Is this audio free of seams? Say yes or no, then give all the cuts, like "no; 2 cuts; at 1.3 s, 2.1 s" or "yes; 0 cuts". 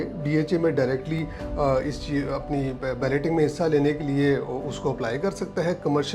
yes; 0 cuts